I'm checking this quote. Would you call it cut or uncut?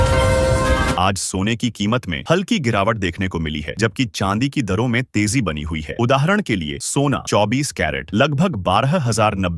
uncut